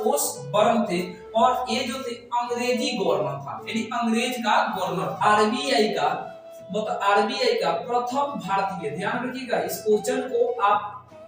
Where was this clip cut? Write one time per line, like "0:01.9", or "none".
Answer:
0:05.1